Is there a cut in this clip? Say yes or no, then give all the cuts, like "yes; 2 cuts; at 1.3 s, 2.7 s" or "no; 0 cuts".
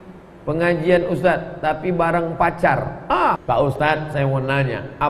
yes; 1 cut; at 3.4 s